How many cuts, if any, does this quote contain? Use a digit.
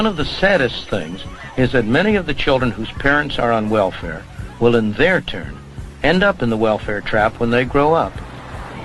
1